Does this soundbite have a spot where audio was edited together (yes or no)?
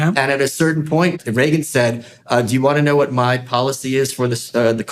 yes